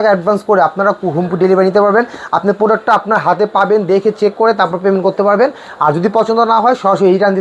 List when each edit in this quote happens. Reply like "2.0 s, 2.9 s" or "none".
none